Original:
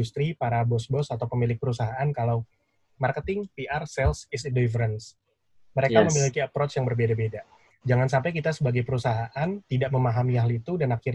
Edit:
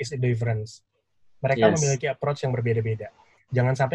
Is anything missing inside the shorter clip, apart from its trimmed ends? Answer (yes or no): no